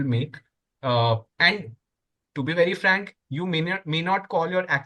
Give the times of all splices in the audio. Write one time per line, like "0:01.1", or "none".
none